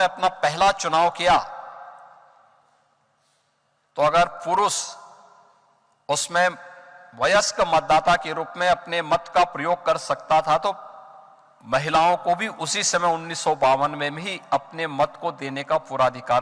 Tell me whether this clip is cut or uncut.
uncut